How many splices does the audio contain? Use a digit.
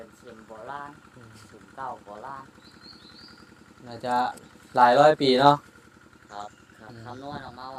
0